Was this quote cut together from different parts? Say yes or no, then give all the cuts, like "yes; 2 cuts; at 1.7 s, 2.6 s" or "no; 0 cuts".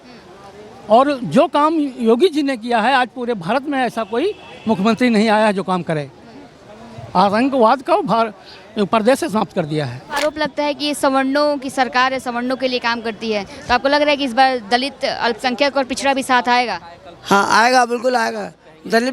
yes; 1 cut; at 10.1 s